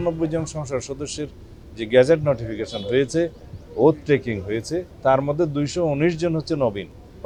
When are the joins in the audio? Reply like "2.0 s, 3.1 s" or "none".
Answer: none